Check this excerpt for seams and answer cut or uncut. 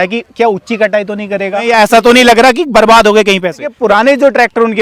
cut